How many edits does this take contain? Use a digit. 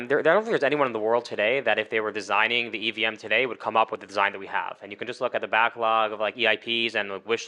0